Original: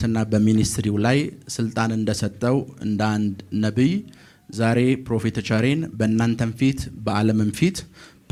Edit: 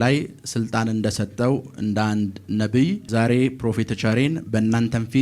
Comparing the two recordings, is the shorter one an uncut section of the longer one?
no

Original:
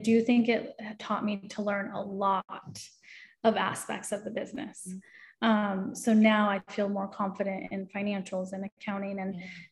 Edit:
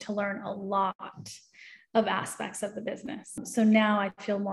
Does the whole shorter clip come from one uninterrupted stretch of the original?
no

